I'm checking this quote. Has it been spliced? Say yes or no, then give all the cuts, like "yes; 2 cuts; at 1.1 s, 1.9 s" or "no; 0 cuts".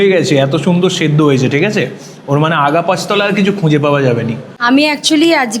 yes; 1 cut; at 4.5 s